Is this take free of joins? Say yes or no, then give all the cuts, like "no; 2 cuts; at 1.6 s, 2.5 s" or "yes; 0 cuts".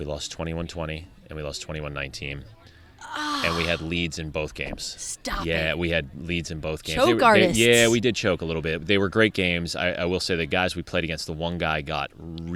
yes; 0 cuts